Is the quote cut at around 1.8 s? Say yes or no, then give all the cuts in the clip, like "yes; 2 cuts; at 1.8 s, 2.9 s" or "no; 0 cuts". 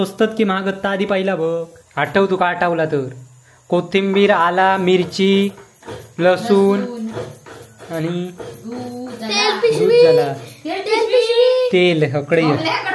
yes; 1 cut; at 1.8 s